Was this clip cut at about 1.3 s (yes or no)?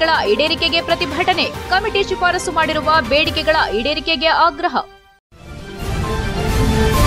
no